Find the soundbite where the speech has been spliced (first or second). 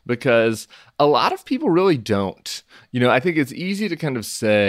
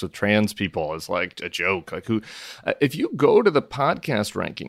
first